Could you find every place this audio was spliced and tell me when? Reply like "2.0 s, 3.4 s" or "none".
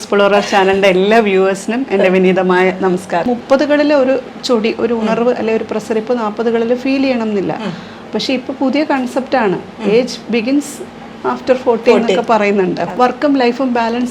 3.3 s, 12.9 s